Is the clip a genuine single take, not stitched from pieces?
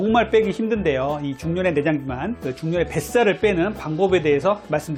yes; 0 cuts

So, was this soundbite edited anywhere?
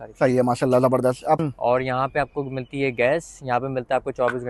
yes; 1 cut; at 1.4 s

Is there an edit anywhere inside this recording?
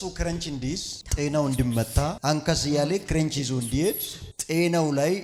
no; 0 cuts

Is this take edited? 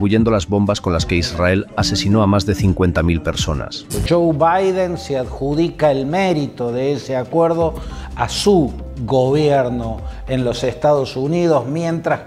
no; 0 cuts

